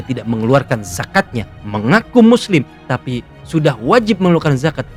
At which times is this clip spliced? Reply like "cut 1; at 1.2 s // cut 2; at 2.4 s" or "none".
none